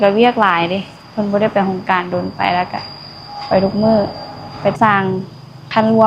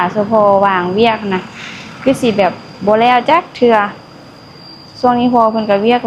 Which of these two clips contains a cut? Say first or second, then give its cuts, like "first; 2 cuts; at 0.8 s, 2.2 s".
first; 1 cut; at 4.7 s